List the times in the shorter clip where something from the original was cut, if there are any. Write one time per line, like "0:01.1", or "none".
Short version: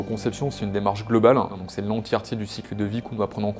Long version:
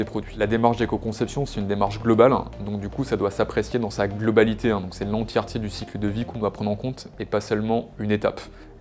0:01.6